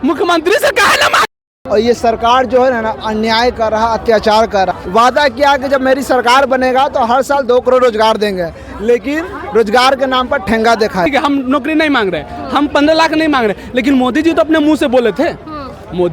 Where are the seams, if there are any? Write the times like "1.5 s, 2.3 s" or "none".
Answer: 1.5 s, 4.7 s, 11.1 s